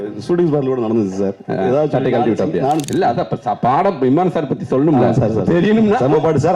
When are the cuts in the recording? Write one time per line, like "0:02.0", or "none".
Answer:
0:02.8